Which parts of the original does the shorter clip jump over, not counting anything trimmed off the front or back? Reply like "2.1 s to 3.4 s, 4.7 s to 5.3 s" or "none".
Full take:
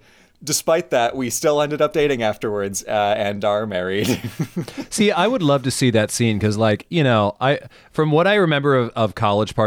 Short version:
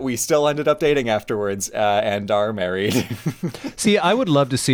none